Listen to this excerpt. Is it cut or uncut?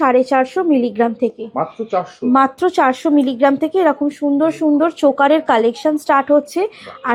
uncut